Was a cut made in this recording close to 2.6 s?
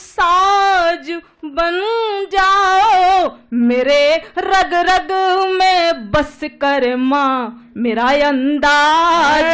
no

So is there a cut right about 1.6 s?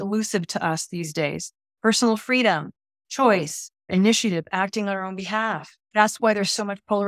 no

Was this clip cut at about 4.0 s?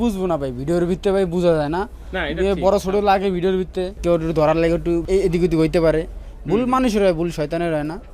yes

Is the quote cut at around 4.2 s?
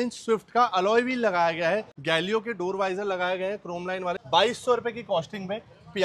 yes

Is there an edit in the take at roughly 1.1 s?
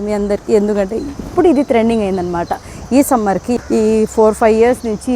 no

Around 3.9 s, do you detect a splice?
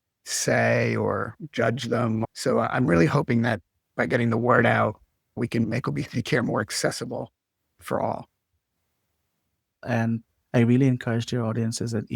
no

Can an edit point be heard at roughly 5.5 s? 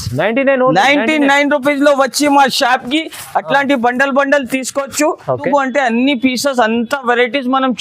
yes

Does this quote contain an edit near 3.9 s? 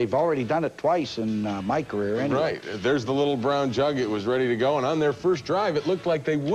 yes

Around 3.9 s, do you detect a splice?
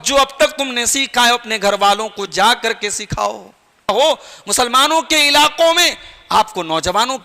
yes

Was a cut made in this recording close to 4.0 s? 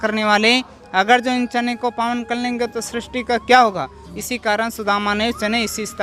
no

